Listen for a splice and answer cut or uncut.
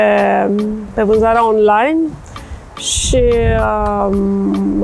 uncut